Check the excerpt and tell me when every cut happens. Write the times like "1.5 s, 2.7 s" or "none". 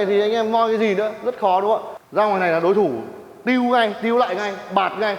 2.0 s